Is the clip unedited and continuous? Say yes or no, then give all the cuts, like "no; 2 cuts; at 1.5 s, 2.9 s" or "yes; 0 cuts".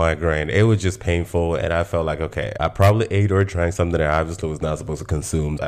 no; 1 cut; at 2.5 s